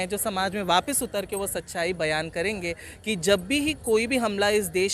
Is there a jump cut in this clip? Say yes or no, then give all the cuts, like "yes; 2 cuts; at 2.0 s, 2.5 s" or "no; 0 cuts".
no; 0 cuts